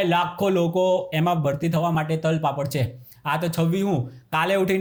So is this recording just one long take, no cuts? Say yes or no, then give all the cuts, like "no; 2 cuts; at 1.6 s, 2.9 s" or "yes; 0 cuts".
yes; 0 cuts